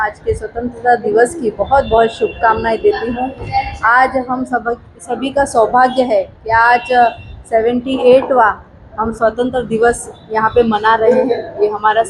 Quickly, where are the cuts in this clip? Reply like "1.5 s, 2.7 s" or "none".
none